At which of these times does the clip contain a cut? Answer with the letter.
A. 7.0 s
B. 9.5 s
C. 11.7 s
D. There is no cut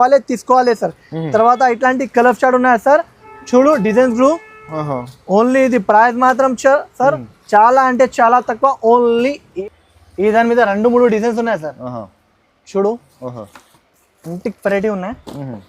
B